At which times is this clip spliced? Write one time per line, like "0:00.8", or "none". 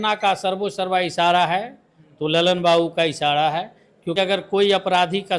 0:04.2